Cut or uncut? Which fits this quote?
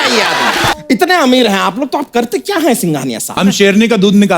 cut